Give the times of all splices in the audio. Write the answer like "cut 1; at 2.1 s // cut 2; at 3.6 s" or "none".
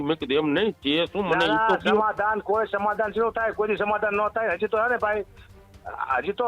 none